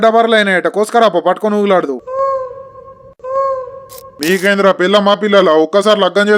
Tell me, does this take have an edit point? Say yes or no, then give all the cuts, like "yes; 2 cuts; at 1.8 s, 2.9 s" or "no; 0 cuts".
yes; 1 cut; at 4.2 s